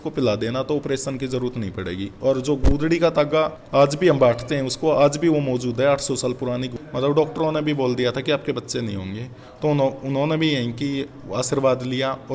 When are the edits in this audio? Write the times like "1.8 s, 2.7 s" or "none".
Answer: 6.8 s